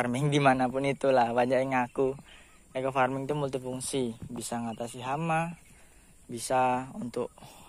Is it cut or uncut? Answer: uncut